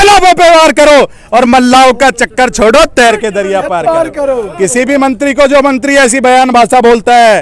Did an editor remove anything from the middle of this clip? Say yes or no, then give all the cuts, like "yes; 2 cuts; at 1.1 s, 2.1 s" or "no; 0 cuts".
no; 0 cuts